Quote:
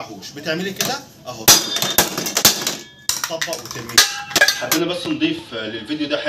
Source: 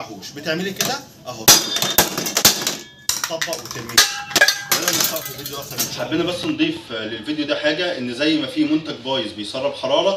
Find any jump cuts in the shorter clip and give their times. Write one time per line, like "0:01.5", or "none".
0:04.5